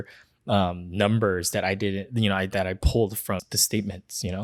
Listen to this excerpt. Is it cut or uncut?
uncut